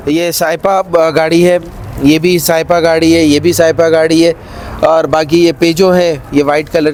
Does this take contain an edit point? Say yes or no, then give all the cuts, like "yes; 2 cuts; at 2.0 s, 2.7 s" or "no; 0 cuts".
no; 0 cuts